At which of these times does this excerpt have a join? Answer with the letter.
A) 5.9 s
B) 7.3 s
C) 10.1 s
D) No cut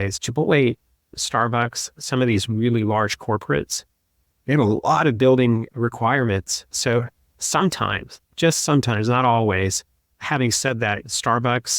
C